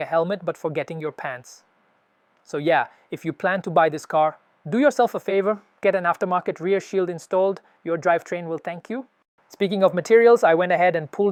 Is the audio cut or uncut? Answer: uncut